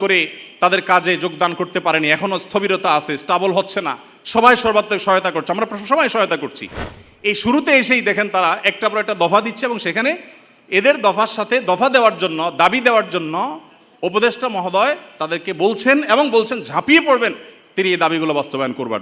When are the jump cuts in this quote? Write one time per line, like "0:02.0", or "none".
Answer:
none